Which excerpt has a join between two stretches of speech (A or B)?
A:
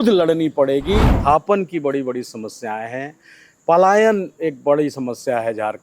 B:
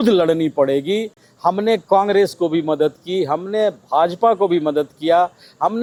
A